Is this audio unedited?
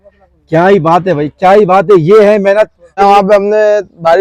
no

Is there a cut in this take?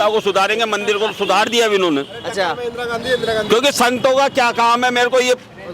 no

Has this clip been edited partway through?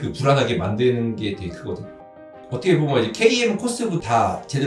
yes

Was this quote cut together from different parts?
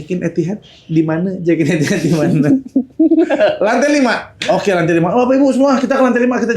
no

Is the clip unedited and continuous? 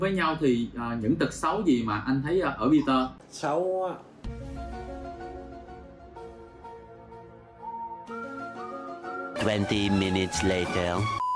yes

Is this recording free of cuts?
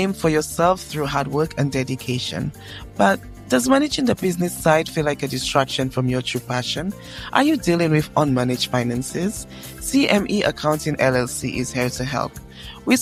yes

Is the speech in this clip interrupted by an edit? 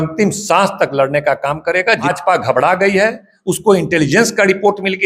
yes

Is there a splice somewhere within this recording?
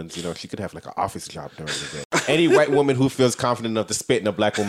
yes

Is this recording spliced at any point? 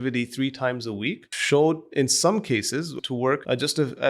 yes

